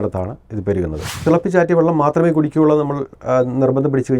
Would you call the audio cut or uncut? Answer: cut